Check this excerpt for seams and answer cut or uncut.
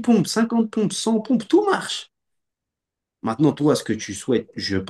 uncut